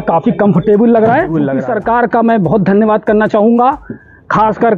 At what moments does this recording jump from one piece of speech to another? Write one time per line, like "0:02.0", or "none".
0:01.3